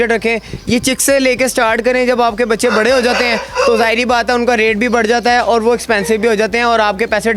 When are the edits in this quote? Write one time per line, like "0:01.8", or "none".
none